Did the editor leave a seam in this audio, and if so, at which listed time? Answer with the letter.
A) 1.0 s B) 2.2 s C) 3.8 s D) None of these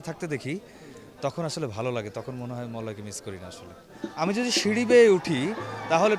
C